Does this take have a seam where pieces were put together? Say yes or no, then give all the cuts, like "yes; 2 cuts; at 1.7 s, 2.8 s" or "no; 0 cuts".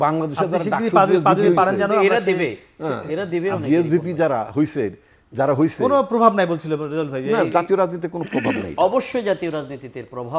no; 0 cuts